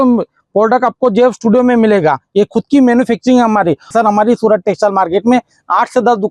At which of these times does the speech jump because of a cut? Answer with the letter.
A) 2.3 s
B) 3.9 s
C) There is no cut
B